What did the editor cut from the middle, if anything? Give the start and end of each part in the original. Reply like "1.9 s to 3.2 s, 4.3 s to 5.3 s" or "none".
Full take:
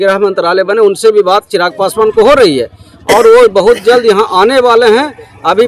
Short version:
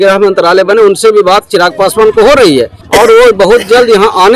2.8 s to 2.9 s